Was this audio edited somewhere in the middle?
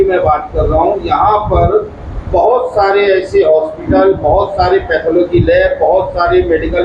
no; 0 cuts

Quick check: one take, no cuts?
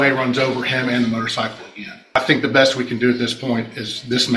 no; 1 cut; at 2.1 s

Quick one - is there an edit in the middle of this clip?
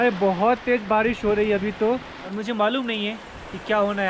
yes; 1 cut; at 2.1 s

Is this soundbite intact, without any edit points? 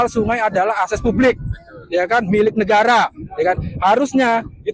yes; 0 cuts

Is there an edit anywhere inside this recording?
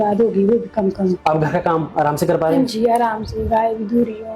yes; 1 cut; at 1.2 s

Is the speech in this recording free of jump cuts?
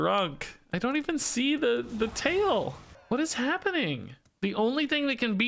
no; 2 cuts; at 2.9 s, 4.2 s

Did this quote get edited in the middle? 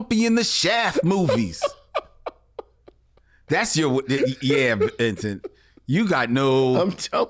no; 0 cuts

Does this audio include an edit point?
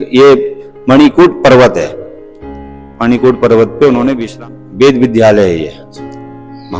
yes; 1 cut; at 4.3 s

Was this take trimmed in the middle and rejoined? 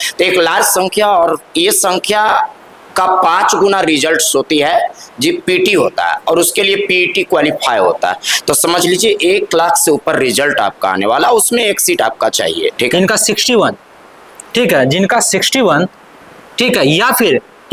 yes; 1 cut; at 12.9 s

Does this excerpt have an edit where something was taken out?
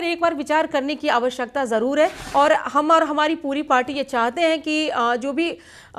yes; 1 cut; at 2.2 s

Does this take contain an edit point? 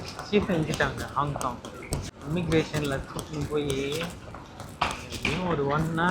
yes; 1 cut; at 2.1 s

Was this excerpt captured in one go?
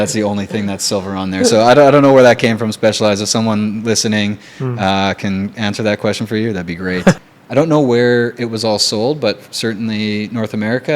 no; 1 cut; at 7.2 s

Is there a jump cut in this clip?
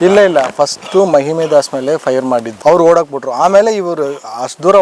no; 0 cuts

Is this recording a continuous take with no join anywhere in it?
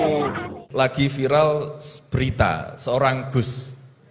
no; 1 cut; at 0.9 s

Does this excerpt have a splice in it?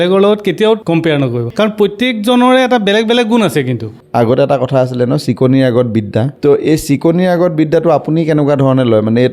yes; 3 cuts; at 1.1 s, 3.9 s, 6.3 s

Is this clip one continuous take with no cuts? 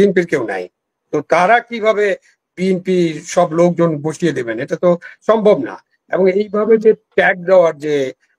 yes; 0 cuts

